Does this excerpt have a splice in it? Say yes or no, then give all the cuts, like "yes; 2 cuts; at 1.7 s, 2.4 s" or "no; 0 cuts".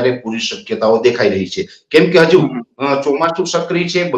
no; 0 cuts